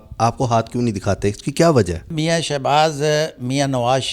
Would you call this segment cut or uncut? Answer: cut